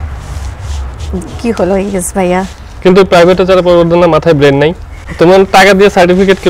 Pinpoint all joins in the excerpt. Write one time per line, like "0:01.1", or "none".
0:05.0